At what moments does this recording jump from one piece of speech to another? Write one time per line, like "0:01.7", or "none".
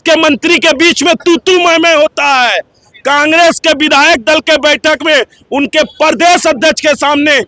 none

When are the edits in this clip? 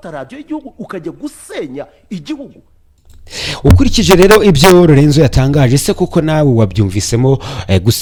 none

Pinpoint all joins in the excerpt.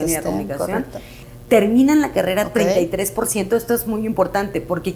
0:01.2

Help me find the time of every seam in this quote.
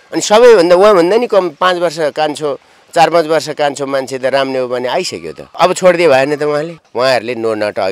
0:05.5
0:06.8

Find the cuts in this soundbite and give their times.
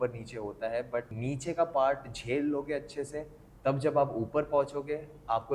0:01.2

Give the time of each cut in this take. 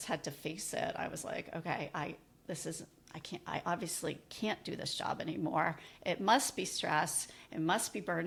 none

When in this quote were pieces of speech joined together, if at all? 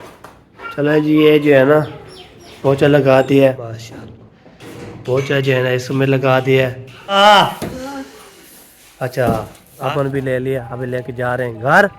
0:03.6
0:07.2
0:09.7

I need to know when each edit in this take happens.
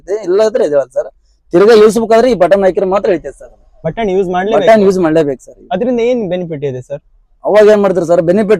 0:03.8

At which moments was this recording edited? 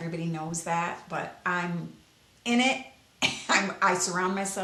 none

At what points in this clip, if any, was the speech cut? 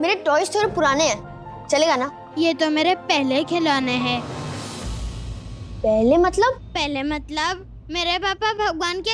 0:02.2

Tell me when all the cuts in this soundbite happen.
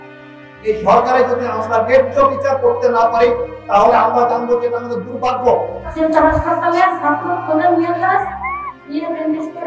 0:05.8

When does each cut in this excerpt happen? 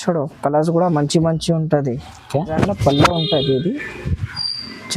0:02.6

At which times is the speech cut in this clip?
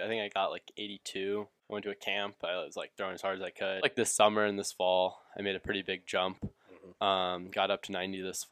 0:01.6
0:03.8

